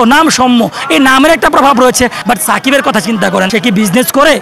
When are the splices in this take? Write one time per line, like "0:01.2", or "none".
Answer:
0:02.2
0:03.5